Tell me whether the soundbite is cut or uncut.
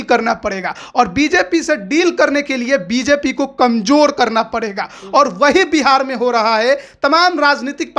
uncut